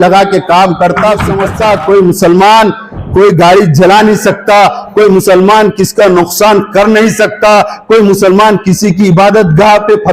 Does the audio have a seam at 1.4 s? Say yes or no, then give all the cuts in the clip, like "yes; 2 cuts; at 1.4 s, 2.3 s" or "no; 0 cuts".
yes; 1 cut; at 1.4 s